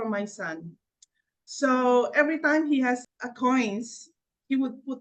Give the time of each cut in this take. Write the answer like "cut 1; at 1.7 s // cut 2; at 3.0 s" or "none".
none